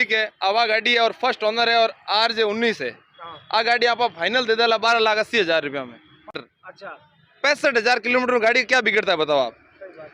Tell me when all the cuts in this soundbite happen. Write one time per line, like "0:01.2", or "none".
0:06.4